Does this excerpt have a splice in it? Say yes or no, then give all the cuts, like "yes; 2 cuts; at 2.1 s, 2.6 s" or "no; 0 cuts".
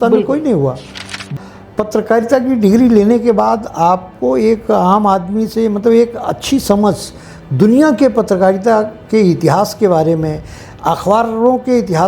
yes; 1 cut; at 1.3 s